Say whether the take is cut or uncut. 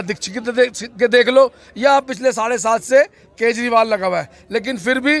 uncut